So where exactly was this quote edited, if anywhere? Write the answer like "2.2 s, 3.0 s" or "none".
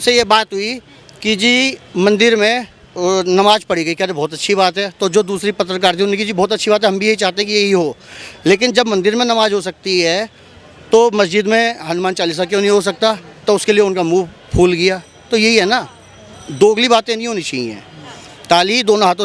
none